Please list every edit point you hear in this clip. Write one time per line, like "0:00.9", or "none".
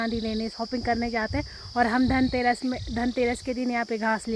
none